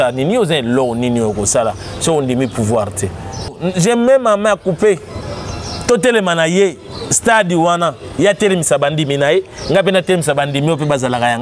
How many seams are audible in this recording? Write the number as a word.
one